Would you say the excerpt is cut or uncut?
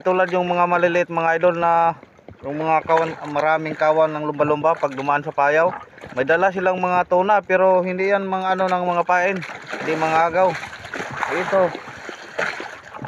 uncut